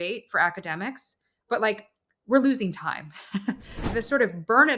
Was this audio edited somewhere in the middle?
yes; 1 cut; at 3.9 s

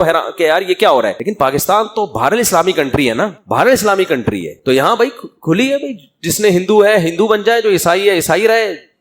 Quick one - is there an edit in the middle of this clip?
yes; 2 cuts; at 1.2 s, 3.4 s

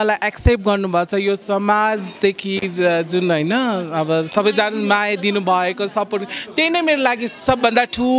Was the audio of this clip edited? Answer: no; 0 cuts

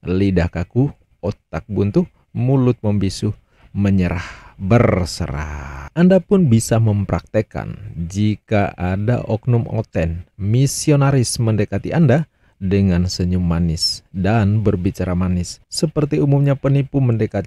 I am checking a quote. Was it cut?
no; 0 cuts

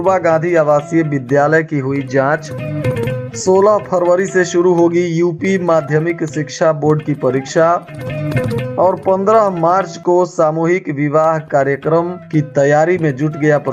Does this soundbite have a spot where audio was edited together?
no; 0 cuts

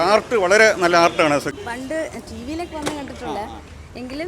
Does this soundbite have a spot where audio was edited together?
yes; 1 cut; at 1.5 s

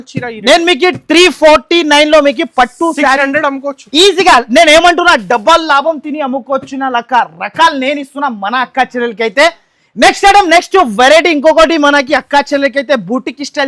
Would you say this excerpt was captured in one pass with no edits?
yes; 0 cuts

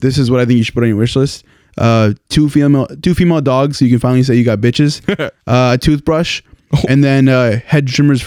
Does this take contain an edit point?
no; 0 cuts

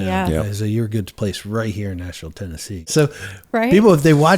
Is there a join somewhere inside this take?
yes; 1 cut; at 2.9 s

